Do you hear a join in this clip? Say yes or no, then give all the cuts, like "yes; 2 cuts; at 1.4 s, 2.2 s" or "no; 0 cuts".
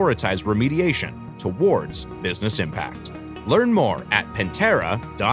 no; 0 cuts